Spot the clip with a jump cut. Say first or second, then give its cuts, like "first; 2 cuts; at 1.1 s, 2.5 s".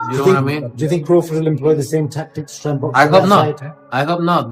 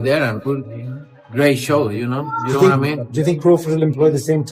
second; 1 cut; at 1.1 s